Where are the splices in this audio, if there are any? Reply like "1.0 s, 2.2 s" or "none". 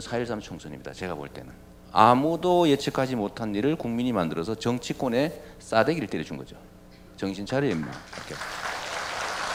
none